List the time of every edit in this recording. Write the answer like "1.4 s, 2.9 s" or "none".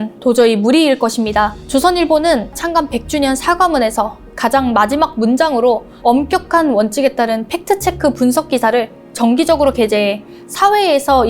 1.6 s, 2.6 s, 5.9 s